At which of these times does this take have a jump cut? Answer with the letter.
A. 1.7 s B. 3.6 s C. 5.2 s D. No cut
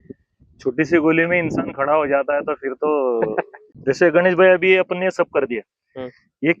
B